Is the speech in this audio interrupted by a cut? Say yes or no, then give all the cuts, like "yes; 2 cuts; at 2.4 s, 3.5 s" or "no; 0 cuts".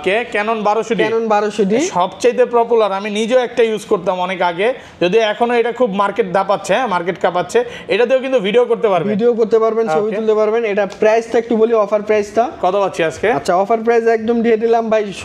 no; 0 cuts